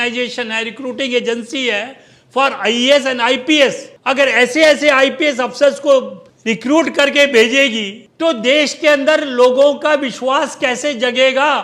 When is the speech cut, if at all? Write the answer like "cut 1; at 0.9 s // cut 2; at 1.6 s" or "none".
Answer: none